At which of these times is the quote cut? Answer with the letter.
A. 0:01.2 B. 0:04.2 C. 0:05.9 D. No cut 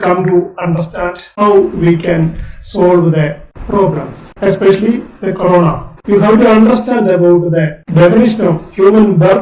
C